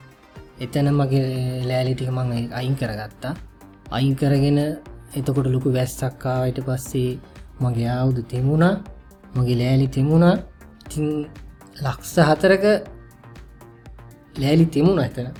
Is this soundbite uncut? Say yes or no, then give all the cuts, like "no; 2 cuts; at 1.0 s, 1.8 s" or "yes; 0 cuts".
yes; 0 cuts